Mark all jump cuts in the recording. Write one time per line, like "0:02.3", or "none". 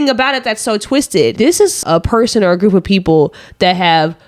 0:01.8